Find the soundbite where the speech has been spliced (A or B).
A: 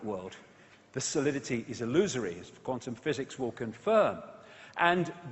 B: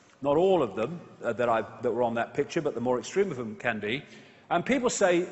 A